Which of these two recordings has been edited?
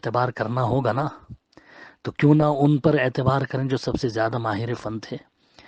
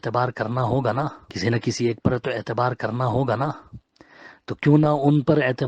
second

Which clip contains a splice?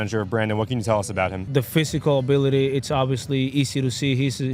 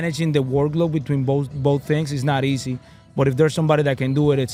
first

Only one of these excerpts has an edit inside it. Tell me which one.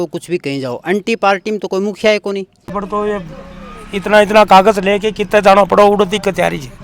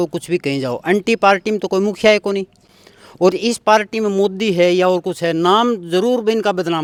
first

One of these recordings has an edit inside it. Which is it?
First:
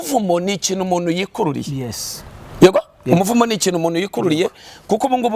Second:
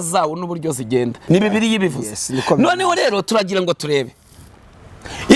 second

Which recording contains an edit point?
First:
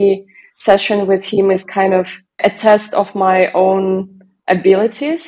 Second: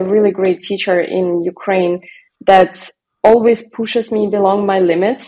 first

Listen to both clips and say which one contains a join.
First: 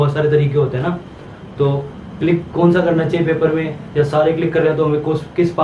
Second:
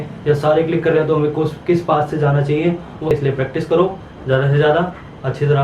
second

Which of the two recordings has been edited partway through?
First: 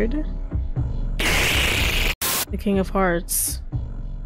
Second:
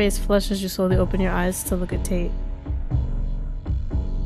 first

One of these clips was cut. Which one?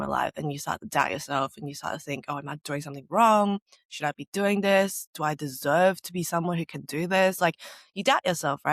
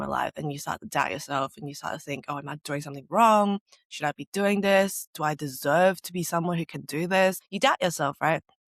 second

